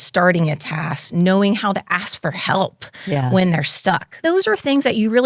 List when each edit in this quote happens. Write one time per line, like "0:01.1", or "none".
0:04.2